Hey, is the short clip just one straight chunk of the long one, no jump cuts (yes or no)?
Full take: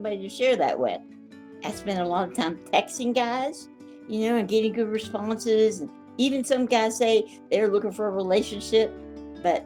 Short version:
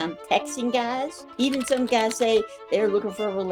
no